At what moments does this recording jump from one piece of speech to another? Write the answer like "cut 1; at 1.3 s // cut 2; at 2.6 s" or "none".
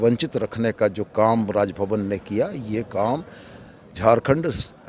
none